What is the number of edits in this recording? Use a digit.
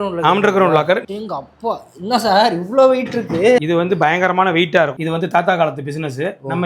3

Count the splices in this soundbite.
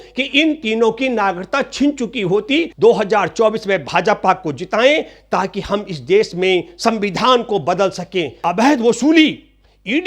2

